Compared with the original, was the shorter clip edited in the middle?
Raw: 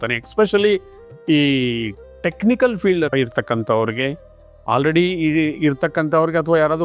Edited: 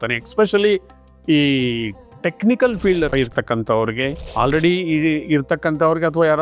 yes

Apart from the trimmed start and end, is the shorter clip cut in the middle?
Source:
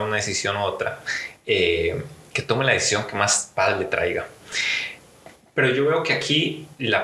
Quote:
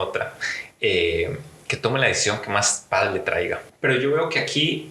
yes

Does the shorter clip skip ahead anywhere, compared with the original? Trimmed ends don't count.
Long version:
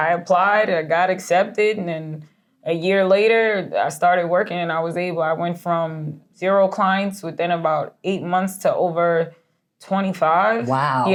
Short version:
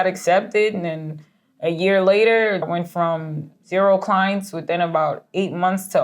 yes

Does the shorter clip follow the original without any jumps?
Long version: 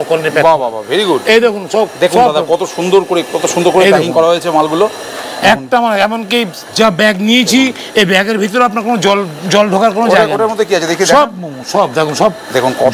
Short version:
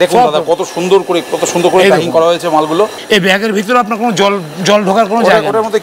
no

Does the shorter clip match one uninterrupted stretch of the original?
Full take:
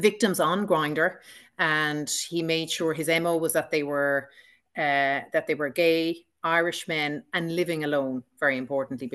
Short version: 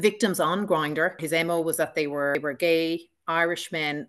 no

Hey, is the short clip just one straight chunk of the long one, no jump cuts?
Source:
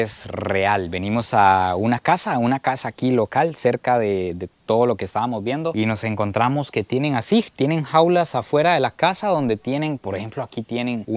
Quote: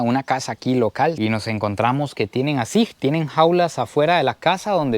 no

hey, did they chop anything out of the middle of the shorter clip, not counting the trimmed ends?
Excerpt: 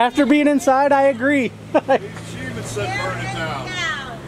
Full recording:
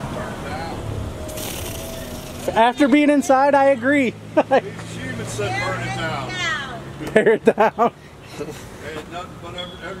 no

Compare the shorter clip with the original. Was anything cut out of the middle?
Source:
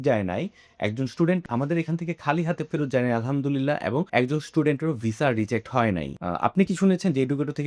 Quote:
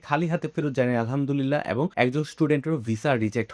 no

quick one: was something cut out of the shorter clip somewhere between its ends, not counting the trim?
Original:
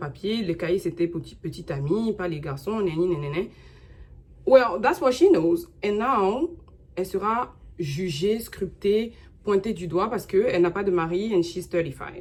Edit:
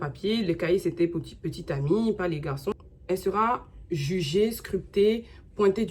yes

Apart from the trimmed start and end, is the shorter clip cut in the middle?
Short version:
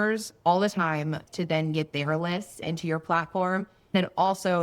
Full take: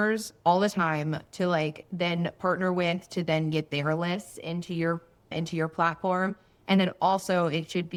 yes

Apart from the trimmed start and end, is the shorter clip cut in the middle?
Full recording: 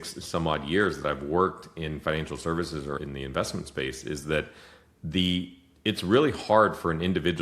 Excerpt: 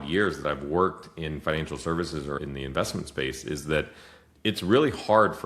yes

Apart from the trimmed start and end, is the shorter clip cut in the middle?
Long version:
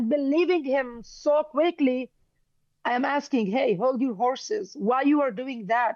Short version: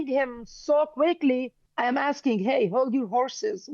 yes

